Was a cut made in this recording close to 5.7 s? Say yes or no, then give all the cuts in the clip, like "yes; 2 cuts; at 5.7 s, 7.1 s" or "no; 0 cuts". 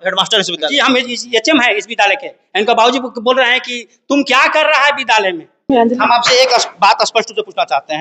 yes; 1 cut; at 5.7 s